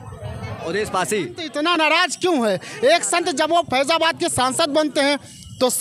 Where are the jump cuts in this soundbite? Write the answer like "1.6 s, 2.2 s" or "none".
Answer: 1.4 s